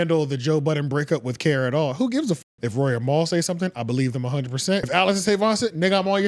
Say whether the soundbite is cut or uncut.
cut